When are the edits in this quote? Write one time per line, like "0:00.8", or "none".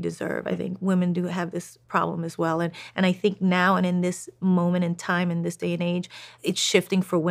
0:06.4

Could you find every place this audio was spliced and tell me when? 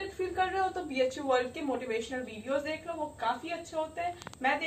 none

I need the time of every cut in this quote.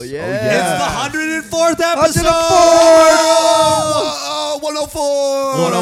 none

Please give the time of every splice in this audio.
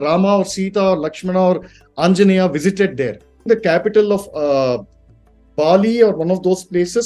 0:03.5

